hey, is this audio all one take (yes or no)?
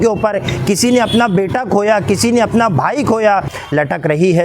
no